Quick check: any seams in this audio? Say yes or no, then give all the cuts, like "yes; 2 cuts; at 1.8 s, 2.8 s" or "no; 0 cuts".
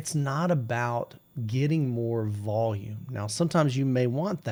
no; 0 cuts